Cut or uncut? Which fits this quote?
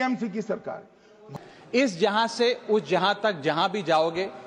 cut